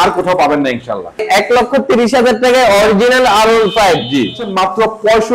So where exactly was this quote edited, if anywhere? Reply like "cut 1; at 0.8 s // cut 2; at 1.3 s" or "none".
cut 1; at 1.2 s // cut 2; at 4.5 s